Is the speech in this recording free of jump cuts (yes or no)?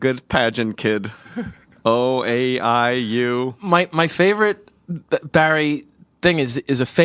yes